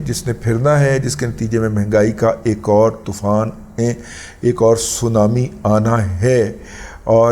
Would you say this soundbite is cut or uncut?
uncut